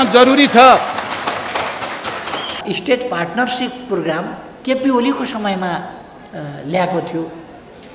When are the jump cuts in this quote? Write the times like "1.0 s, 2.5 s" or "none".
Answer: 2.6 s